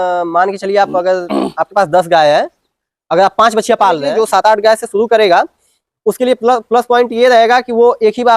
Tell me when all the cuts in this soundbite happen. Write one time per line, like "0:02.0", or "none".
0:04.1